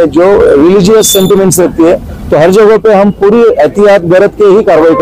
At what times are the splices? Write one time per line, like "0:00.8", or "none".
none